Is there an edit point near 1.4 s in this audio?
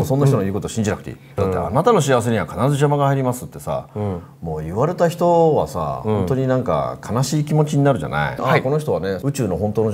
yes; 2 cuts; at 1.4 s, 8.4 s

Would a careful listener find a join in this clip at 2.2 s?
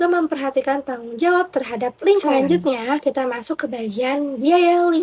yes; 1 cut; at 2.2 s

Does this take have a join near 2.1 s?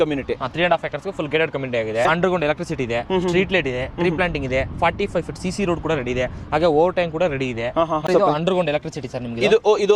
yes; 2 cuts; at 2.1 s, 8.1 s

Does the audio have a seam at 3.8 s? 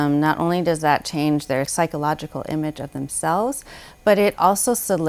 no; 1 cut; at 1.7 s

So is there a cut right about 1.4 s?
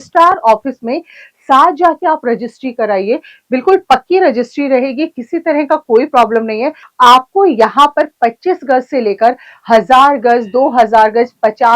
no; 1 cut; at 6.8 s

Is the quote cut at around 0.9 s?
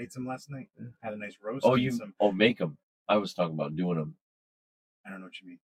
no; 0 cuts

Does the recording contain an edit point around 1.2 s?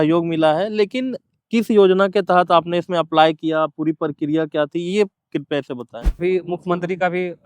no; 1 cut; at 6.2 s

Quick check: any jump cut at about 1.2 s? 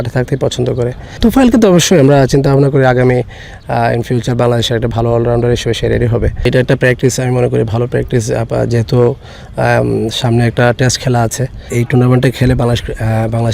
yes; 3 cuts; at 1.2 s, 6.5 s, 11.7 s

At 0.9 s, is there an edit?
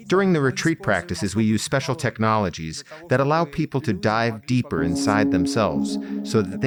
no; 0 cuts

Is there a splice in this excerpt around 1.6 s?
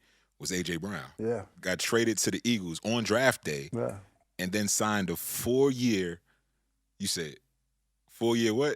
yes; 1 cut; at 1.6 s

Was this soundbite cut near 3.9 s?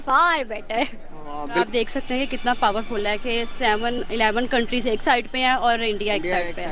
no; 1 cut; at 1.7 s

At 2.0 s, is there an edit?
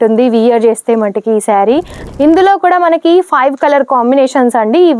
yes; 1 cut; at 2.0 s

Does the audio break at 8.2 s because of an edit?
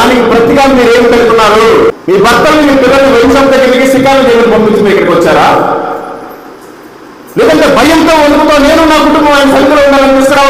no; 1 cut; at 1.9 s

